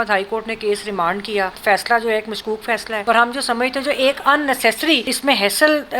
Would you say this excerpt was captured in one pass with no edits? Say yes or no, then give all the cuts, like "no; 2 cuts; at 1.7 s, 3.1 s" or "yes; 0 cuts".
no; 3 cuts; at 1.6 s, 2.9 s, 5.1 s